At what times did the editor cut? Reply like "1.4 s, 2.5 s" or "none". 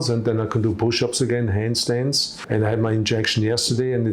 2.3 s